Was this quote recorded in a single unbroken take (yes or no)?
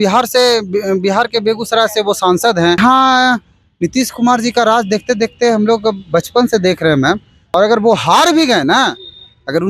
no